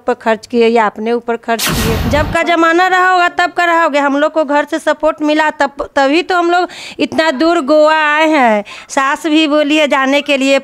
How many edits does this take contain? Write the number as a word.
one